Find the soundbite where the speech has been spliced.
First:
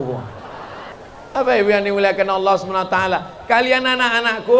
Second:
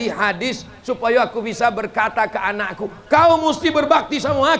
first; 1 cut; at 0.9 s

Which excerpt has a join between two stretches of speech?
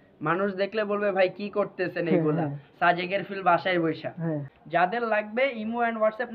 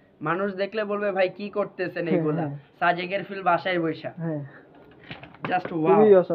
first; 1 cut; at 4.5 s

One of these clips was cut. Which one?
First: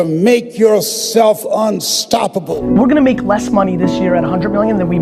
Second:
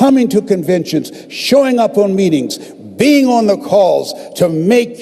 first; 1 cut; at 2.5 s

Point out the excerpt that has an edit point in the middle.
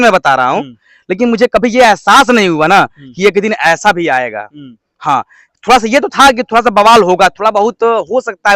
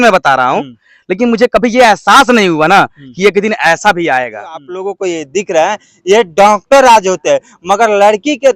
second; 1 cut; at 4.8 s

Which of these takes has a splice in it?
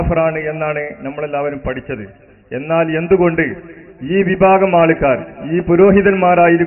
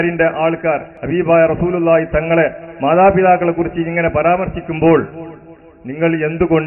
second; 1 cut; at 0.9 s

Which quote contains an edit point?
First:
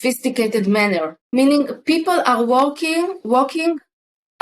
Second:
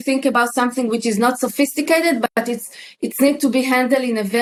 first; 1 cut; at 1.2 s

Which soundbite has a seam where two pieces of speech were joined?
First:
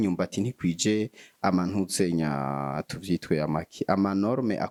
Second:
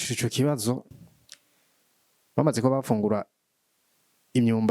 second; 1 cut; at 1.0 s

